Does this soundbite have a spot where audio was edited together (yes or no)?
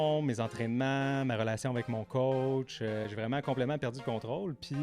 yes